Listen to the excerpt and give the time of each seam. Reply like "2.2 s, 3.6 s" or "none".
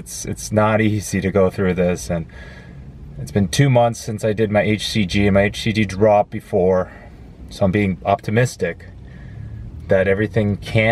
none